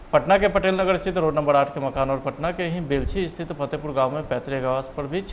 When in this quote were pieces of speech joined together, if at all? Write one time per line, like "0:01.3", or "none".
none